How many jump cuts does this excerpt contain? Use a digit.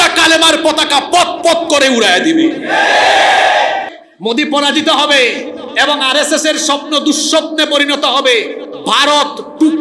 1